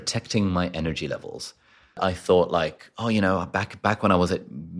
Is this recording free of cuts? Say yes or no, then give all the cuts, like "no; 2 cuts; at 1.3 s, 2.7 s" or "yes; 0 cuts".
no; 1 cut; at 2.0 s